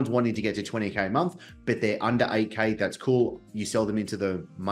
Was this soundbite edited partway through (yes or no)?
no